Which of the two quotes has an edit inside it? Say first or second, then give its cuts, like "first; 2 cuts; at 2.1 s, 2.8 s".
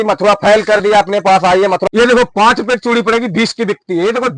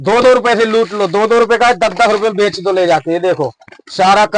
first; 1 cut; at 1.9 s